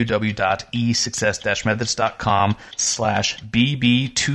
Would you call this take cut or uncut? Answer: cut